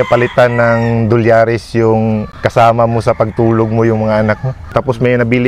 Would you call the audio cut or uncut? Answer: cut